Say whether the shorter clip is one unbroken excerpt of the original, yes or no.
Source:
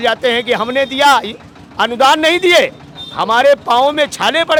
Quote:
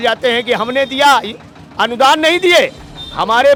yes